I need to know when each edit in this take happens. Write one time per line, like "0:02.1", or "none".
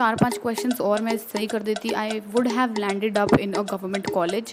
none